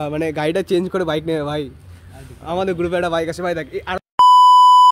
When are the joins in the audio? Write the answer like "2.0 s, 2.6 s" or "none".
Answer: 4.0 s